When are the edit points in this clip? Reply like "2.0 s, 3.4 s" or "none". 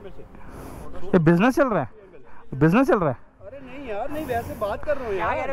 none